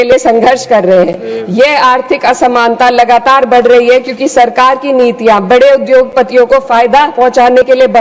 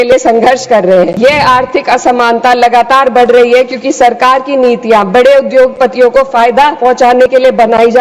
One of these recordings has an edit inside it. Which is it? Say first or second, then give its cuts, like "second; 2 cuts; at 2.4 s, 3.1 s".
second; 1 cut; at 1.1 s